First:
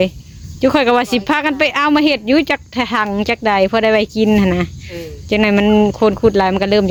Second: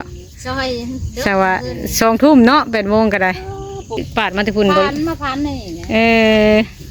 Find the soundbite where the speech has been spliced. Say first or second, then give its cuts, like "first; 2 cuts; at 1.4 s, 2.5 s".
second; 1 cut; at 4.1 s